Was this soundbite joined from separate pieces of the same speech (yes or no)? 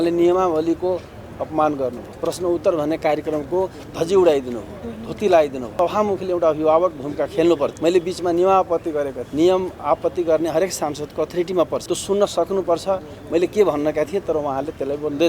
yes